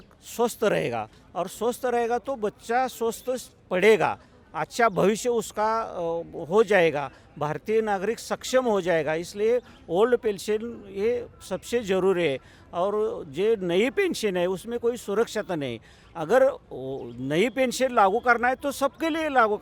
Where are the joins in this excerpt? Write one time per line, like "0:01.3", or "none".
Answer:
none